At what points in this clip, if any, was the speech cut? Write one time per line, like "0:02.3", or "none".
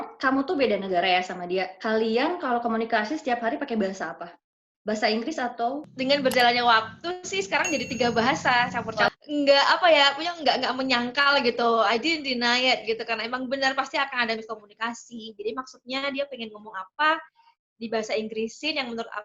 0:09.1